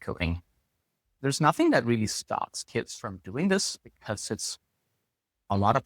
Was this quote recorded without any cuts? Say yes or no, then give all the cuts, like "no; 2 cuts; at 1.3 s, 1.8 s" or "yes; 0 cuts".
no; 1 cut; at 1.1 s